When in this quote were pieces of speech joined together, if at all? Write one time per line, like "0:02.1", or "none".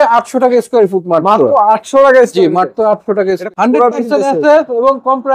0:03.4